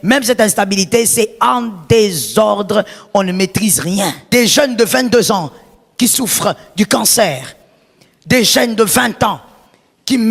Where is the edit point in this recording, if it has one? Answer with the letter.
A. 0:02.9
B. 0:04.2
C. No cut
B